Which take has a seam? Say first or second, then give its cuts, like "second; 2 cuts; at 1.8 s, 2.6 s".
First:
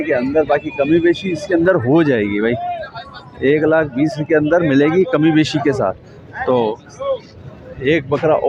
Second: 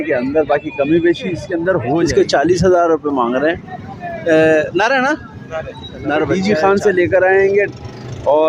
second; 2 cuts; at 2.0 s, 6.3 s